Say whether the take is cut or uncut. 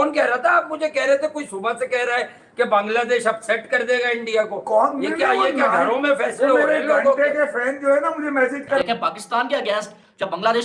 cut